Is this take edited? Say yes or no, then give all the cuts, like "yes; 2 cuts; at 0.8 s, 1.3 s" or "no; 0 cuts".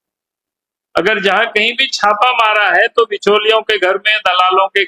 no; 0 cuts